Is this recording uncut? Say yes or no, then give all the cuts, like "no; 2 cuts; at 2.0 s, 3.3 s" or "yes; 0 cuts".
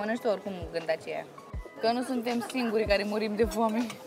no; 1 cut; at 1.5 s